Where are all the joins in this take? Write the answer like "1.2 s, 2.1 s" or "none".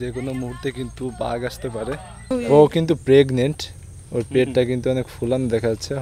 2.3 s